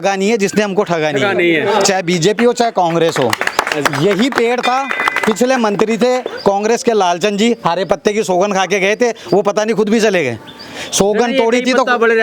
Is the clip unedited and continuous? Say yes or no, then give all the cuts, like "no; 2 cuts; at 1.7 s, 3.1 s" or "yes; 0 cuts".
yes; 0 cuts